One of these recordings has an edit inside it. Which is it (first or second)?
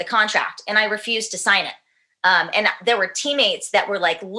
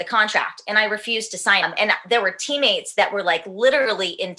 second